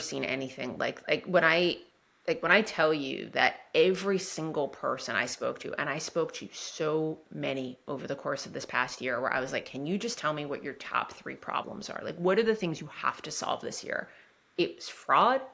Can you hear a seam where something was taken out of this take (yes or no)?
no